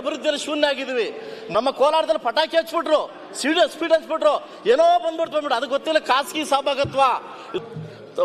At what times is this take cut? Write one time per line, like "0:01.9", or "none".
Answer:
0:01.3
0:07.5